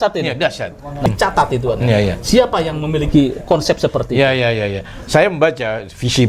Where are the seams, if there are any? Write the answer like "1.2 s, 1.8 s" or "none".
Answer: 1.0 s